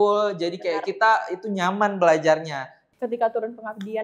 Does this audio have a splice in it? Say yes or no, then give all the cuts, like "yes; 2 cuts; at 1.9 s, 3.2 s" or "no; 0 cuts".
yes; 1 cut; at 2.8 s